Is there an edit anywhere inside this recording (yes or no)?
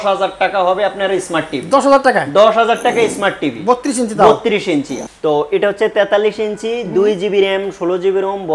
yes